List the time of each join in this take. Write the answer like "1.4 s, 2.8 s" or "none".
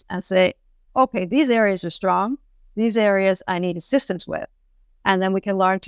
none